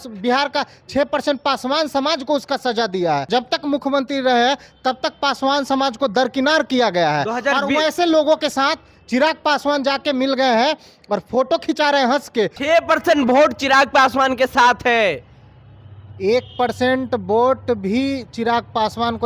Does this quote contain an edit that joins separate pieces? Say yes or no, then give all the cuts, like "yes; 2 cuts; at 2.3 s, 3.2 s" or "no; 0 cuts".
yes; 2 cuts; at 3.2 s, 12.6 s